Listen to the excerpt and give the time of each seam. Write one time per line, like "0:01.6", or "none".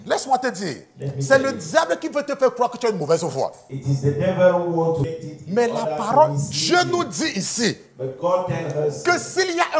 0:05.1